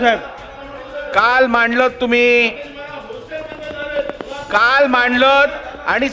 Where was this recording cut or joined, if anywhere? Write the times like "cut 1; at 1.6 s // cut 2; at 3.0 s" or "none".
none